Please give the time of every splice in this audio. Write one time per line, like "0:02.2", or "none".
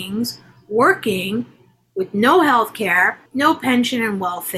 0:03.2